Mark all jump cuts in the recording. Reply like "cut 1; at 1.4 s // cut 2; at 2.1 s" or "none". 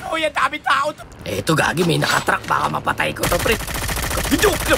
cut 1; at 1.0 s